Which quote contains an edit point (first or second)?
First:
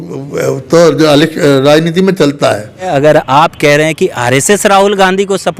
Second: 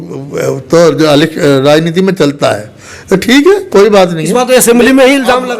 first